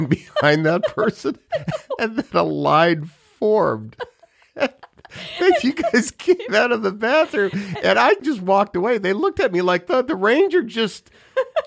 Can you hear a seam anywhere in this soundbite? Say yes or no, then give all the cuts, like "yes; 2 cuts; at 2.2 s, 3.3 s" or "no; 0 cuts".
yes; 1 cut; at 8.2 s